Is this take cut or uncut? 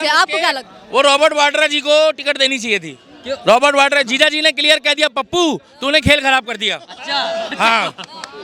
uncut